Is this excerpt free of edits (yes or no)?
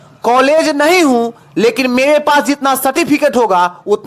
yes